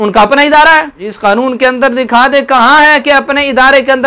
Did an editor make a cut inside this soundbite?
yes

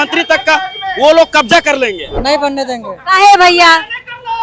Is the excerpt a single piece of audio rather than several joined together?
no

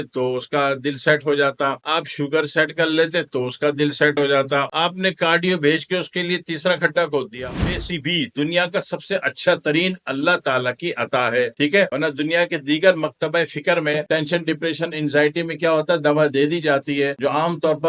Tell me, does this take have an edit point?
yes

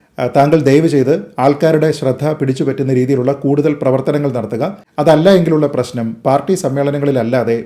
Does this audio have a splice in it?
yes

